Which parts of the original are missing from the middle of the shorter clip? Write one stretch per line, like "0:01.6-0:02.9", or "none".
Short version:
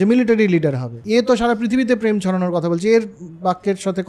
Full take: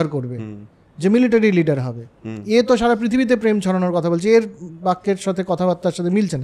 0:01.9-0:02.3